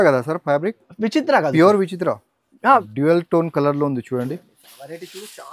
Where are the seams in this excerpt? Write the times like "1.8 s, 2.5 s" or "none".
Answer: 2.9 s